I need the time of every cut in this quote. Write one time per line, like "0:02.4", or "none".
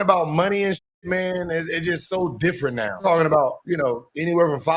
0:03.0